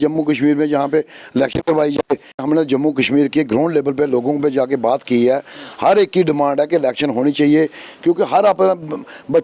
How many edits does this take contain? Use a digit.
1